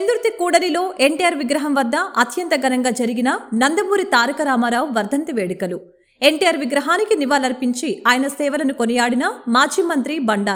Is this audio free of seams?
yes; 0 cuts

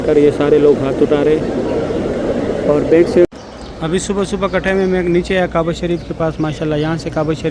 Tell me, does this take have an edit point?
yes; 1 cut; at 3.2 s

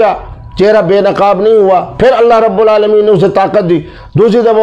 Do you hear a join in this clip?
no; 0 cuts

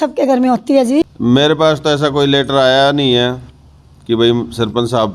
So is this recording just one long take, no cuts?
no; 1 cut; at 1.0 s

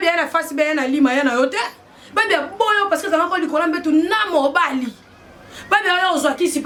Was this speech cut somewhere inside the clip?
no; 0 cuts

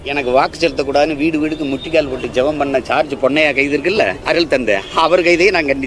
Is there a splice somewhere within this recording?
no; 0 cuts

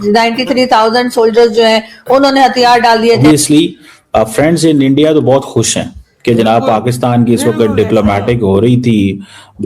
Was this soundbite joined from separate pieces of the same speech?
yes; 1 cut; at 3.2 s

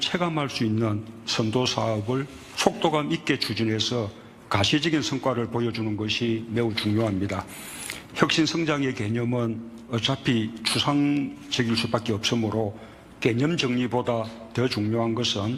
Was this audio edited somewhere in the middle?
no; 0 cuts

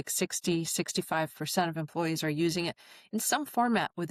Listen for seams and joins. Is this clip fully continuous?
yes; 0 cuts

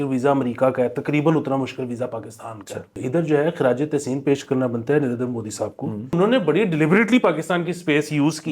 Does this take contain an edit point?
yes; 2 cuts; at 3.0 s, 6.2 s

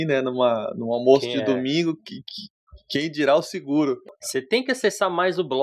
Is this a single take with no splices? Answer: no; 1 cut; at 4.1 s

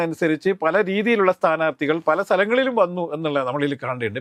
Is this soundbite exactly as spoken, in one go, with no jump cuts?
yes; 0 cuts

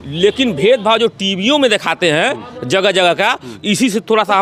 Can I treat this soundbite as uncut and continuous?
yes; 0 cuts

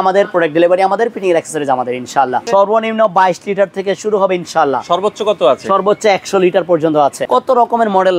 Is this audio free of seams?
no; 2 cuts; at 2.4 s, 7.2 s

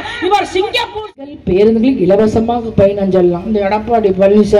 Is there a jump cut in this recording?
yes; 1 cut; at 1.3 s

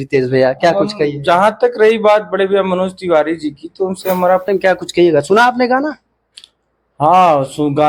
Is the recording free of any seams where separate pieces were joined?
no; 1 cut; at 4.5 s

